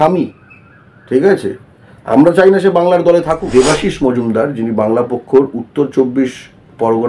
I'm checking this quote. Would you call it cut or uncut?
cut